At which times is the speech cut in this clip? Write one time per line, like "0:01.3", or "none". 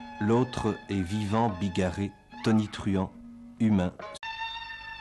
none